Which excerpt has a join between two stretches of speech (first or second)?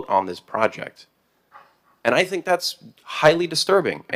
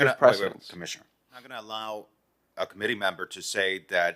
second